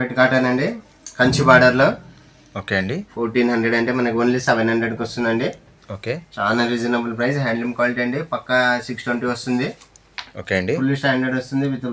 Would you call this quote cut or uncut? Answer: uncut